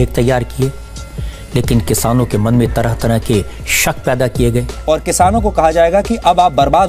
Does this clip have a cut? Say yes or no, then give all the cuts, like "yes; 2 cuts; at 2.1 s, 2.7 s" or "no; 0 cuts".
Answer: no; 0 cuts